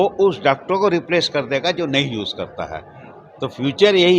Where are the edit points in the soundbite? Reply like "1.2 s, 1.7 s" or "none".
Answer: none

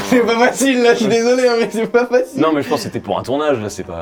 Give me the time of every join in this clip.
none

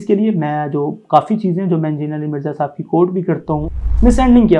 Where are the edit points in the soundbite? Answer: 3.7 s

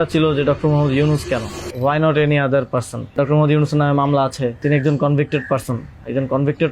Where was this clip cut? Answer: 1.6 s, 3.1 s, 4.6 s

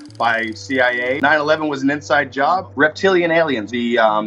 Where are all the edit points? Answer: 1.2 s, 2.8 s

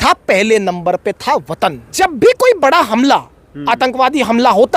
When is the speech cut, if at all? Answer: 1.8 s

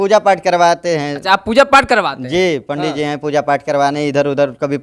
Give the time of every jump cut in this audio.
none

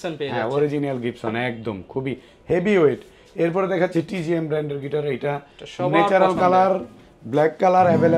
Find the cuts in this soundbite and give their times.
none

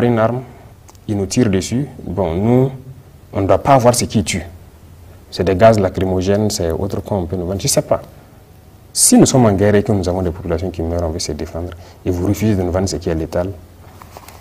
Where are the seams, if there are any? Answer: none

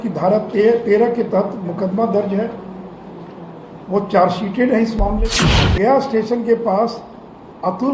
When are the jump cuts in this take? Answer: 5.2 s

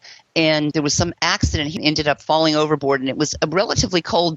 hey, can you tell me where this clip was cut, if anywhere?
0.7 s, 1.8 s

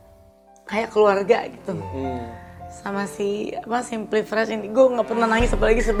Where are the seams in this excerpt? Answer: none

